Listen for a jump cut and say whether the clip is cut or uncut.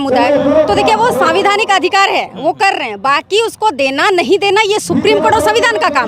uncut